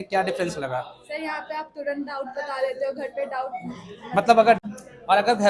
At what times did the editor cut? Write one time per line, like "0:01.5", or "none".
0:04.6